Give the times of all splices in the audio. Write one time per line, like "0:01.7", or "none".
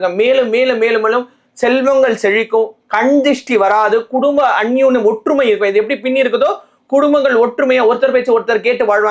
none